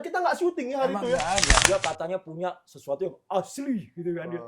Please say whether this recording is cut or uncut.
cut